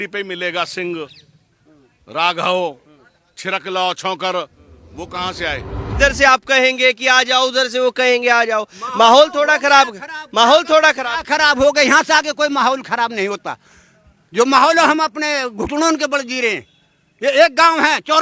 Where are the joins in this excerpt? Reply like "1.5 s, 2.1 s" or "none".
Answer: 6.0 s